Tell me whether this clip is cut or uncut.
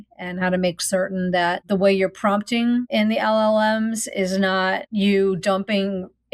cut